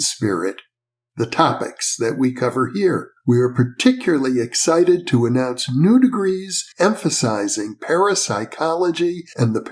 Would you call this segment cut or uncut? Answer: uncut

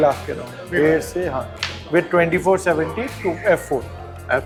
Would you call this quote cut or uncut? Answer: uncut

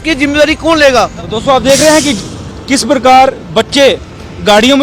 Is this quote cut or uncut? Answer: cut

